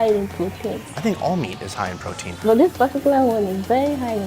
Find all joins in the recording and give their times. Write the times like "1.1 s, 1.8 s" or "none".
0.9 s, 2.3 s